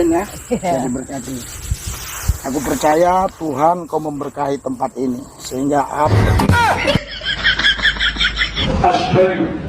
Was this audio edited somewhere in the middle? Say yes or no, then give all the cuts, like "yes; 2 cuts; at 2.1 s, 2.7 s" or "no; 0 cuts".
yes; 1 cut; at 8.6 s